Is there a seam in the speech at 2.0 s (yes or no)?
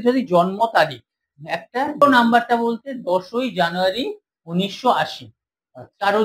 yes